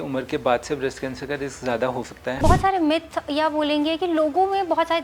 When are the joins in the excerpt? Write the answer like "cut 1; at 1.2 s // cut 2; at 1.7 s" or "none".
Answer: cut 1; at 2.4 s